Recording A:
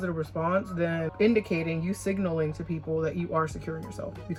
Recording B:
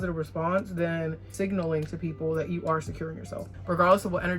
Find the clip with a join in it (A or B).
B